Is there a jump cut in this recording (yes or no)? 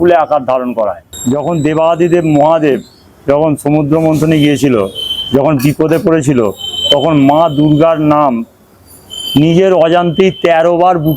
yes